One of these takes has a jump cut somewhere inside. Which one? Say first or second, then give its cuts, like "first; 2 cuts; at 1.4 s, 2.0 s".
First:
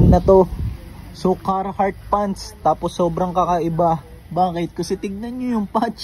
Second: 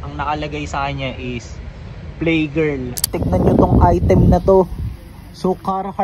second; 1 cut; at 3.1 s